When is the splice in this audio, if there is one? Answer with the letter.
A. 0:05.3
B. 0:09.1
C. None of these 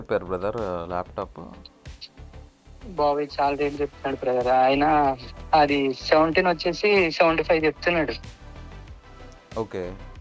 A